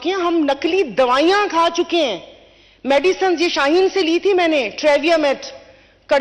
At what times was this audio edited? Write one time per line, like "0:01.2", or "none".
none